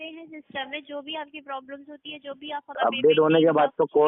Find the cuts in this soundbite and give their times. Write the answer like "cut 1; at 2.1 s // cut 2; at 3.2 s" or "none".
cut 1; at 2.7 s